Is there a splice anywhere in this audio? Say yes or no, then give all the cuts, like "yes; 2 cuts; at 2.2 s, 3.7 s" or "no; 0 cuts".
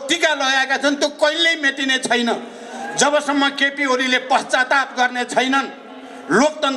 no; 0 cuts